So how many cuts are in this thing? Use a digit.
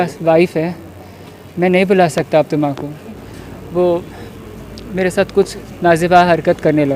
1